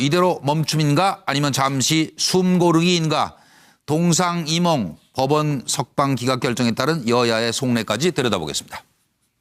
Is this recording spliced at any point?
no; 0 cuts

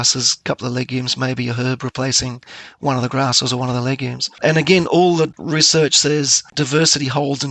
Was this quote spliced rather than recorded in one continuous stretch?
yes; 3 cuts; at 4.3 s, 5.4 s, 6.4 s

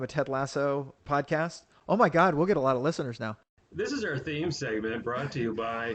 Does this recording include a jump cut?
yes; 1 cut; at 3.5 s

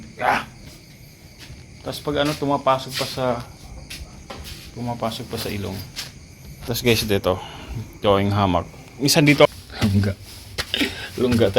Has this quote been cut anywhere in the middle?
yes; 1 cut; at 9.5 s

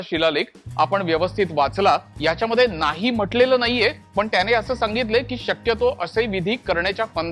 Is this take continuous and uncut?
no; 2 cuts; at 2.1 s, 4.0 s

